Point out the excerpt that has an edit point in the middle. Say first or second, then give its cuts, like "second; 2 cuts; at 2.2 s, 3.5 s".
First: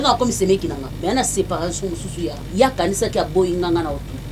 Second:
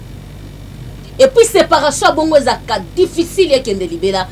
first; 2 cuts; at 0.9 s, 2.4 s